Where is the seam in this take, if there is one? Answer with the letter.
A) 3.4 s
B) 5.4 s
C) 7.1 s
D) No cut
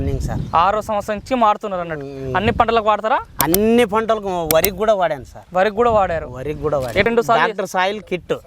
C